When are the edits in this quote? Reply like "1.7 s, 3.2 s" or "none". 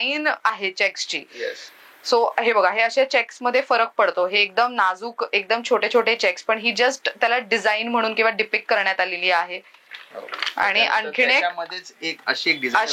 none